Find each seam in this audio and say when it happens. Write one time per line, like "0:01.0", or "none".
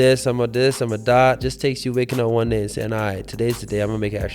0:01.4